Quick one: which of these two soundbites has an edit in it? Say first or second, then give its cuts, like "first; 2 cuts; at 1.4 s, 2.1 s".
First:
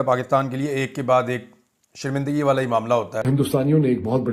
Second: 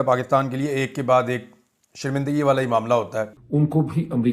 first; 1 cut; at 3.2 s